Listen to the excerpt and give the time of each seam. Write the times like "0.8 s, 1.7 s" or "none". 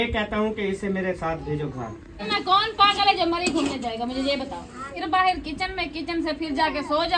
2.3 s, 4.9 s